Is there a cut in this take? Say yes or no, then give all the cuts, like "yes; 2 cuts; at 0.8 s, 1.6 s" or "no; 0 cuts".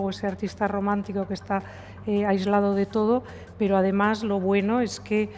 no; 0 cuts